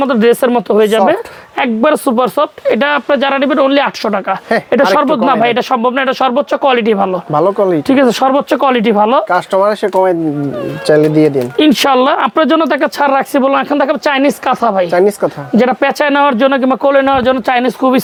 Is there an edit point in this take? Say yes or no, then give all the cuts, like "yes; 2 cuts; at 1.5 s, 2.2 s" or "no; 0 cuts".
no; 0 cuts